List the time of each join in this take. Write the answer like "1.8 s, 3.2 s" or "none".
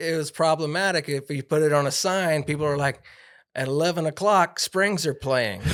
none